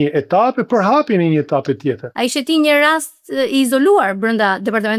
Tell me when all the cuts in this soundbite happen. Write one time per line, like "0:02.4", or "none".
0:02.1